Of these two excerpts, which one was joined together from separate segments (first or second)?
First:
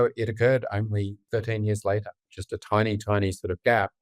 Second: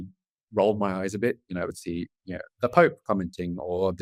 first